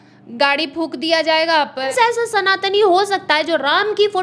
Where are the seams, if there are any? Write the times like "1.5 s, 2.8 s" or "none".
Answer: 1.9 s